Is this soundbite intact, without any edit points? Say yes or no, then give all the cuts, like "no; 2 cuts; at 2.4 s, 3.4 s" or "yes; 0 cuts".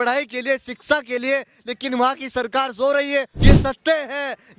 no; 1 cut; at 3.3 s